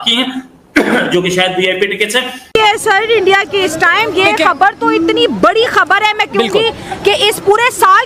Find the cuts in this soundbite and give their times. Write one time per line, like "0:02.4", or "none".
0:02.4